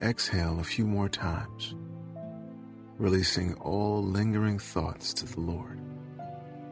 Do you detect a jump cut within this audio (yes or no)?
yes